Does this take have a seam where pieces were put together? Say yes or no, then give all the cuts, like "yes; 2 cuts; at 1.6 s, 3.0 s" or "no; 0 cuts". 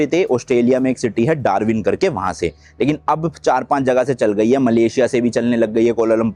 no; 0 cuts